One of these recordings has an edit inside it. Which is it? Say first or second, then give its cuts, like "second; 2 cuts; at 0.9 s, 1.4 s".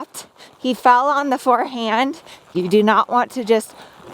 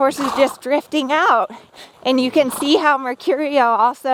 first; 1 cut; at 2.5 s